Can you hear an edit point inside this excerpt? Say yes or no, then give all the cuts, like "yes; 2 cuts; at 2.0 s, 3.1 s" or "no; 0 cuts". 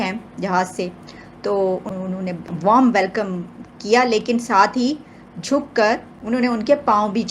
yes; 2 cuts; at 1.9 s, 6.1 s